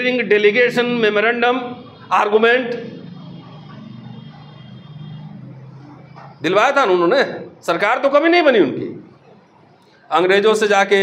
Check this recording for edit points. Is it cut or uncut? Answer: uncut